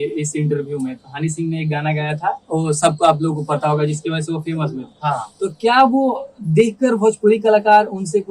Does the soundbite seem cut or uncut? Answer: uncut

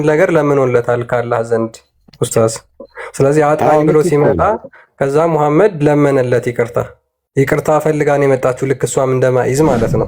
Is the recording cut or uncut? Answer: uncut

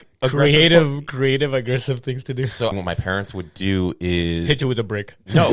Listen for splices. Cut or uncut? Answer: cut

